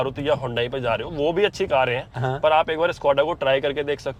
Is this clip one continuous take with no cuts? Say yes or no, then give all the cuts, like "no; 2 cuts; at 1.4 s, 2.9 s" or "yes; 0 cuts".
yes; 0 cuts